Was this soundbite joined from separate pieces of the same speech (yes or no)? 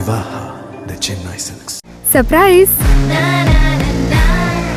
no